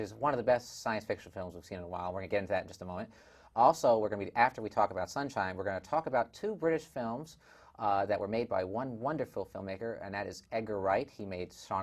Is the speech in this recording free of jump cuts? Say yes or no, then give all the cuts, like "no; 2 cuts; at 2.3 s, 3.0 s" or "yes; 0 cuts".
no; 1 cut; at 2.9 s